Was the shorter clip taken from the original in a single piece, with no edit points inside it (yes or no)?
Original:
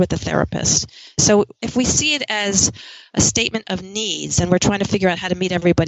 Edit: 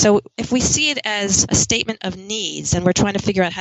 no